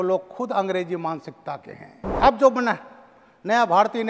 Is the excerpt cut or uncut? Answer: cut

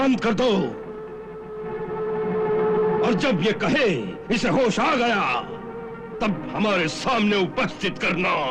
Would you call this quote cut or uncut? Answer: uncut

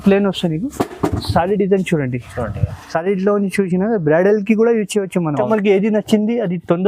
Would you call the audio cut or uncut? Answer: cut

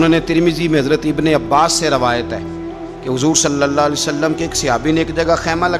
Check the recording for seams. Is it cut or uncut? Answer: uncut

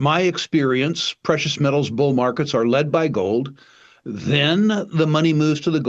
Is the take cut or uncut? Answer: uncut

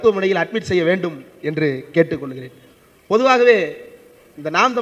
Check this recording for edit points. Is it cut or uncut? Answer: uncut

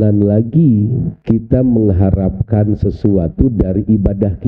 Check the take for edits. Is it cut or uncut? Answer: cut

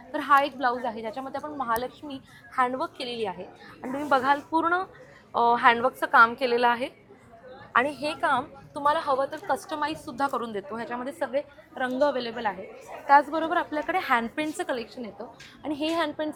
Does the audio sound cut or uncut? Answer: uncut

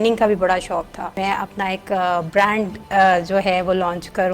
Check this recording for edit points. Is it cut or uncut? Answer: cut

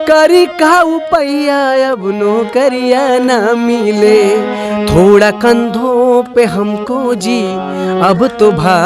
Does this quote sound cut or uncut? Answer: cut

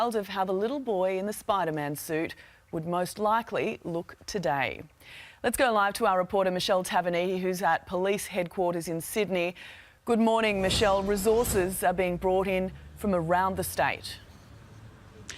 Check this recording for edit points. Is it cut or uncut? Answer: cut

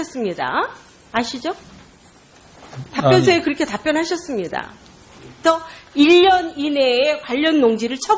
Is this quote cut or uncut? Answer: uncut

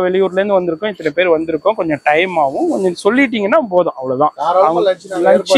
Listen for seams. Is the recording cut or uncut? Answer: uncut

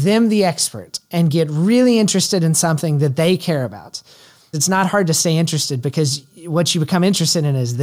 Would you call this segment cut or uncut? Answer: uncut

